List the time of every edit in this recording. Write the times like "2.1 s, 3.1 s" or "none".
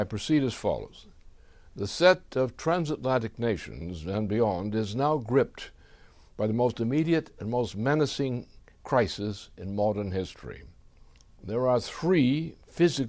6.7 s